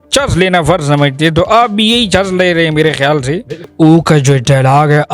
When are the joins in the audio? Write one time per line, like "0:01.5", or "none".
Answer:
0:03.7